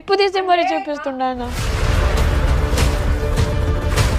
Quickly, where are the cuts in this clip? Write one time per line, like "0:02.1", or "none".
0:01.6